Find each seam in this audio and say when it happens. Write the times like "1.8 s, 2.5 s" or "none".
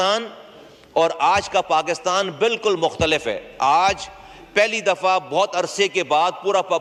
none